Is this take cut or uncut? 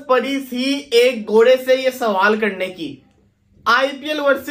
uncut